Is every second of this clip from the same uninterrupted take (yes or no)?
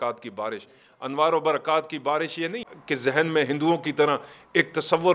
no